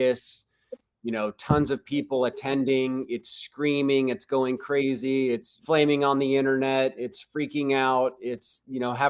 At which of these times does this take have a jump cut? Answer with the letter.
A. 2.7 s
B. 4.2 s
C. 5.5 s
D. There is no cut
C